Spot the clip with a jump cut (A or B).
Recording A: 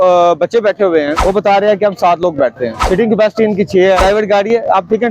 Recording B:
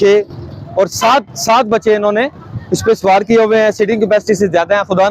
A